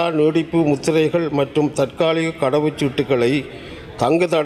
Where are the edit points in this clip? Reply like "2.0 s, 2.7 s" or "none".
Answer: none